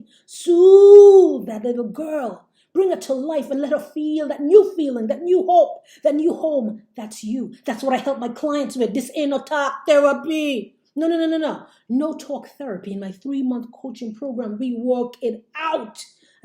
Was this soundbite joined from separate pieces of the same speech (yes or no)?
no